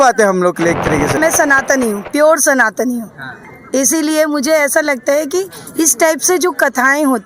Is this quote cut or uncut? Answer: cut